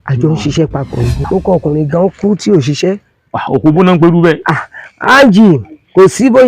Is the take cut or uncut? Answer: cut